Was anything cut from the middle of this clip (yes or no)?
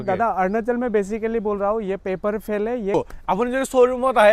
yes